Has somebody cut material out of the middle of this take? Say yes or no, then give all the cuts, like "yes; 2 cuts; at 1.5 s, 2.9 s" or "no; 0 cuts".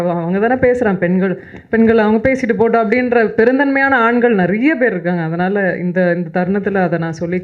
no; 0 cuts